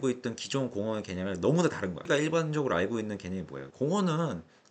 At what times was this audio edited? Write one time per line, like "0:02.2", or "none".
0:02.0
0:03.6